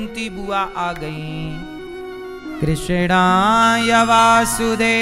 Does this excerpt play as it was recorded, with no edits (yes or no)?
yes